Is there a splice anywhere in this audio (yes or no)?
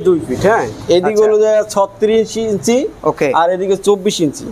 no